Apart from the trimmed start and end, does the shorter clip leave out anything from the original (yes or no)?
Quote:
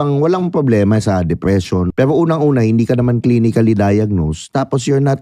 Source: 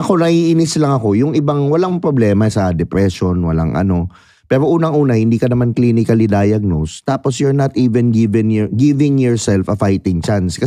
yes